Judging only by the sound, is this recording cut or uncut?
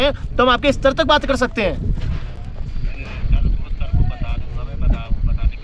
uncut